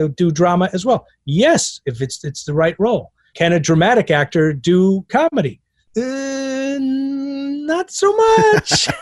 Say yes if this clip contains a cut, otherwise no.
no